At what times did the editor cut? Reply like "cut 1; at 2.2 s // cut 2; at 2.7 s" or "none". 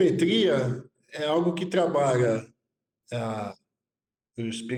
none